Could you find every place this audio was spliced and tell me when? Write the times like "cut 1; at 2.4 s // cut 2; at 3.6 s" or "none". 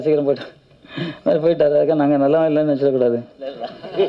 none